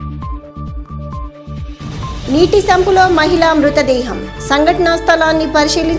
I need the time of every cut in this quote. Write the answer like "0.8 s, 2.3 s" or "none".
1.9 s